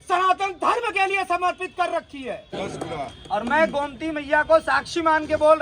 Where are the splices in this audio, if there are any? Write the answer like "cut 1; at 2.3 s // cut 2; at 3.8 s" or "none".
cut 1; at 2.5 s

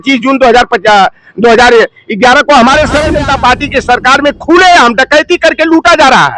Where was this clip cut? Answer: cut 1; at 3.0 s

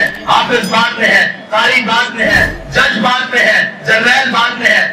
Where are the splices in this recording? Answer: none

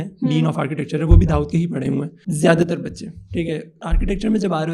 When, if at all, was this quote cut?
cut 1; at 2.2 s // cut 2; at 3.8 s

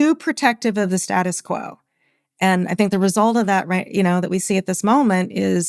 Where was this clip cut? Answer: none

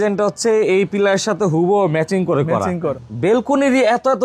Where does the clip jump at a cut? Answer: cut 1; at 3.0 s

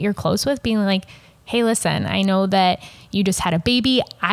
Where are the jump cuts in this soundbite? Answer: none

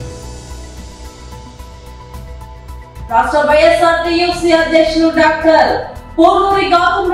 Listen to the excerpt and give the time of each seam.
cut 1; at 3.0 s

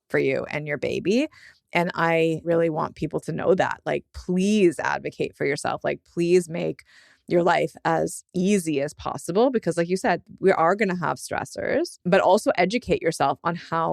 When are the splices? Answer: cut 1; at 2.4 s // cut 2; at 12.0 s

